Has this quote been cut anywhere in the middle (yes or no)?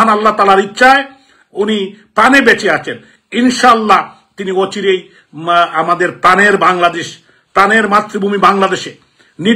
no